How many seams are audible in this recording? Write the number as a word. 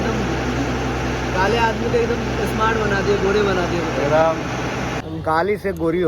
one